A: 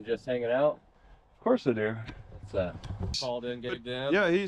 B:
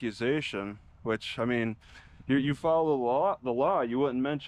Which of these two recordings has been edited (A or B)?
A